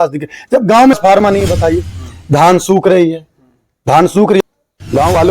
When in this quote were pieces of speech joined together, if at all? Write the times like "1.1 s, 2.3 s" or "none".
1.0 s, 4.4 s